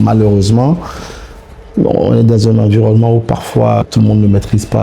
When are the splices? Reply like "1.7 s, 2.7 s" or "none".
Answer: 3.8 s